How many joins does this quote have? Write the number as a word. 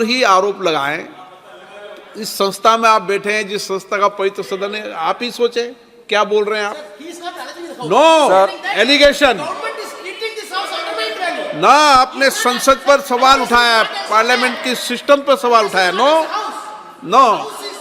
zero